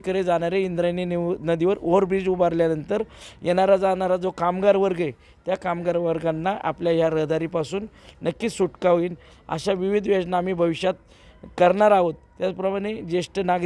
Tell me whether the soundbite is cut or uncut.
uncut